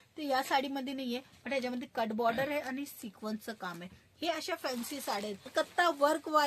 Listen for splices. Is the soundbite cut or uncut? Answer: cut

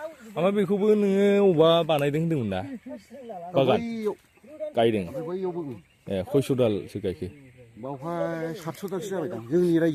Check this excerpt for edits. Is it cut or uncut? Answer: uncut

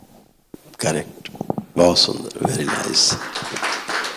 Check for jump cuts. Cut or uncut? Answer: uncut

